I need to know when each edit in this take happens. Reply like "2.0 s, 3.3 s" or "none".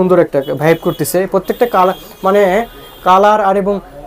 none